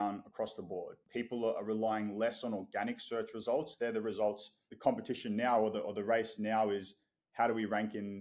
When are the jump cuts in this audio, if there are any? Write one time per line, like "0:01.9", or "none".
0:01.0
0:04.6